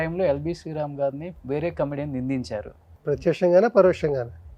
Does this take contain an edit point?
yes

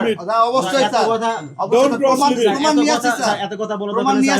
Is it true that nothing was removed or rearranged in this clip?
yes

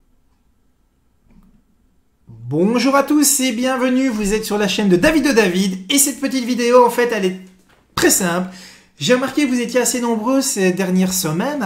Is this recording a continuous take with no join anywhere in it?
yes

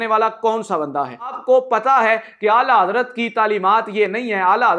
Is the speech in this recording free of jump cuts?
no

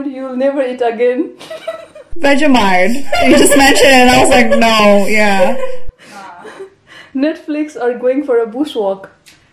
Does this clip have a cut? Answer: no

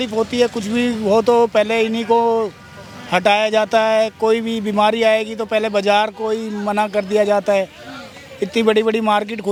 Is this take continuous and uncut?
yes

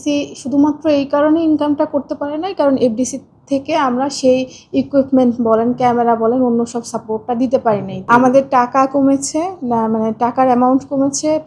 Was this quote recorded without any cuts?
no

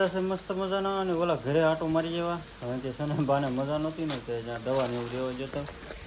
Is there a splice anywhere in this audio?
no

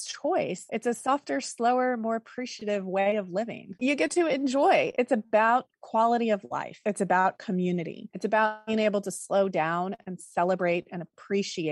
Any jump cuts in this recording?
yes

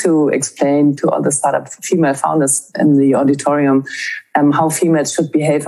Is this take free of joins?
no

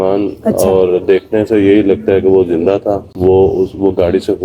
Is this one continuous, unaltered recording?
no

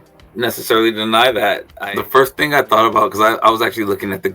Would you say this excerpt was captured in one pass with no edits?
no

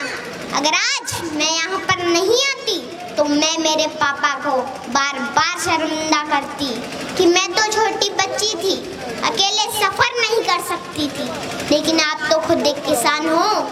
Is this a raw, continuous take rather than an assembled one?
yes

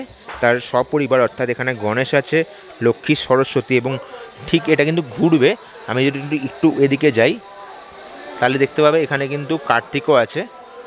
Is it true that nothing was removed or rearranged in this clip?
yes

